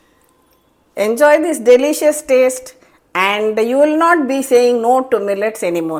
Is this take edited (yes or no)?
no